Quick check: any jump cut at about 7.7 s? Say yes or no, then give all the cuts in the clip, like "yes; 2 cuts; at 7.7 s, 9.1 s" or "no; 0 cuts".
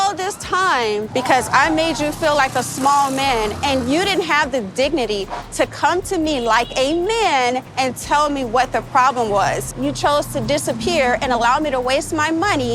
yes; 3 cuts; at 1.1 s, 7.7 s, 9.7 s